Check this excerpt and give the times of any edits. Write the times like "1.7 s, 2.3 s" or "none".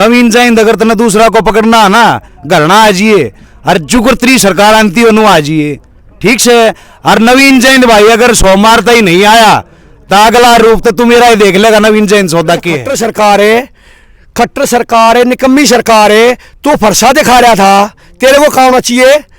12.9 s